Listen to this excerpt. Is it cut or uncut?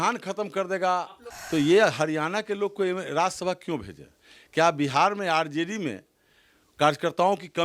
cut